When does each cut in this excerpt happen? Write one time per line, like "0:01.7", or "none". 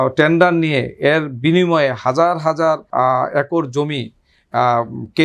0:02.8